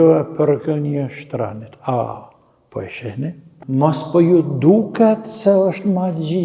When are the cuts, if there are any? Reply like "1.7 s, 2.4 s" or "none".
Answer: 3.5 s